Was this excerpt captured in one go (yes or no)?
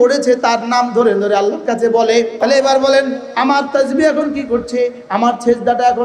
no